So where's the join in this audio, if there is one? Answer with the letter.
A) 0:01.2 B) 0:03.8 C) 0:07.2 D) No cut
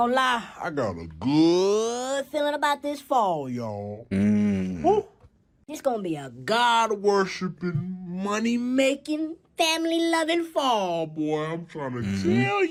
D